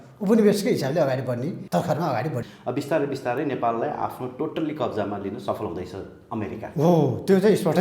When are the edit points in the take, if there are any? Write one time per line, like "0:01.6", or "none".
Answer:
0:01.6
0:02.5